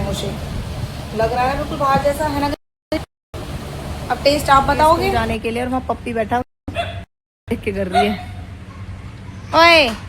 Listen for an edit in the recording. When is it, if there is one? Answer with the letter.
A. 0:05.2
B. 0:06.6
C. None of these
A